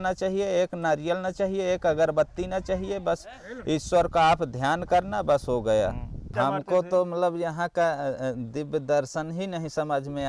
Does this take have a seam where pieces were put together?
yes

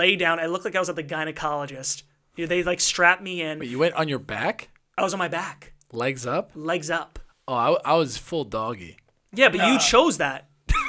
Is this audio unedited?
yes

